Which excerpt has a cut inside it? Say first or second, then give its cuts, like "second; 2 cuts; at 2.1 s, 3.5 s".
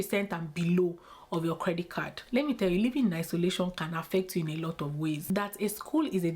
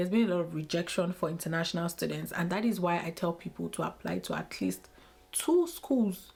first; 2 cuts; at 2.2 s, 5.3 s